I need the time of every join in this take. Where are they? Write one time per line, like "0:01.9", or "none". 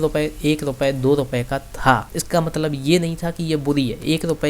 0:02.1